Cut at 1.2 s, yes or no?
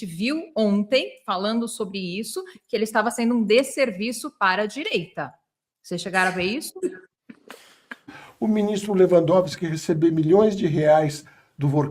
no